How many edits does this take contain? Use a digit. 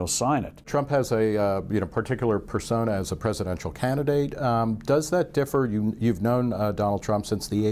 0